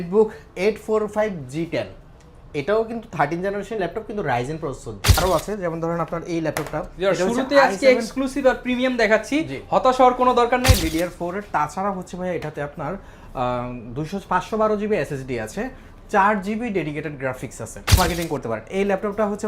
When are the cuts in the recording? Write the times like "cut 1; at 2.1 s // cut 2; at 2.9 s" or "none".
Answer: cut 1; at 5.2 s // cut 2; at 10.8 s // cut 3; at 18.0 s